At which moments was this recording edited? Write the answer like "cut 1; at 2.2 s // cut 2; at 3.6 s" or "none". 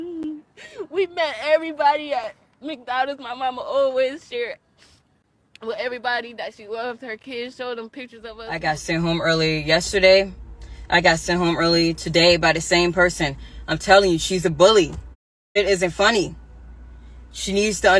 cut 1; at 8.4 s

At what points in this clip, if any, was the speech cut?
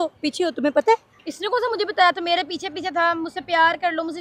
none

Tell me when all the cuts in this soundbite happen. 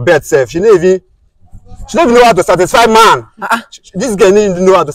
none

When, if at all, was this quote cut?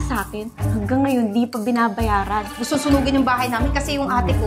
cut 1; at 2.5 s

